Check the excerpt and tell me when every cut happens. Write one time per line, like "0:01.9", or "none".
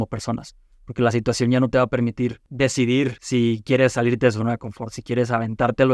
0:02.4
0:03.2